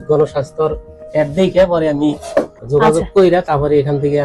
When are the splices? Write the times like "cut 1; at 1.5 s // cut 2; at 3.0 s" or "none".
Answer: cut 1; at 2.6 s